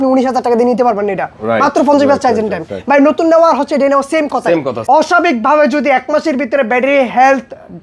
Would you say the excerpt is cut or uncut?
cut